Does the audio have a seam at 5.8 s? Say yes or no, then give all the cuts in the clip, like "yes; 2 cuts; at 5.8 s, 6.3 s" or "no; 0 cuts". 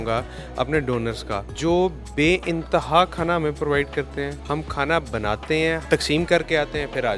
yes; 2 cuts; at 1.5 s, 5.8 s